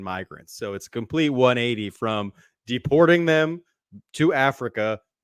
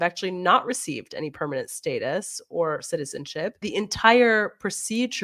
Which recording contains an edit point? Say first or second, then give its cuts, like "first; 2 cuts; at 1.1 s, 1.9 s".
second; 1 cut; at 3.6 s